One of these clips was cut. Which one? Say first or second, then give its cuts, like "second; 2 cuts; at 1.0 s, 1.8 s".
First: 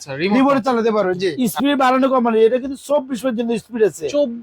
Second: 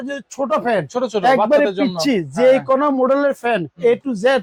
first; 1 cut; at 1.3 s